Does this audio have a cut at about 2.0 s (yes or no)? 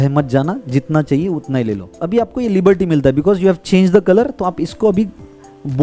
yes